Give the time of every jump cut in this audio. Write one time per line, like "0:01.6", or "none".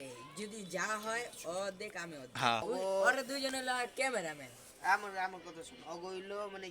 0:02.6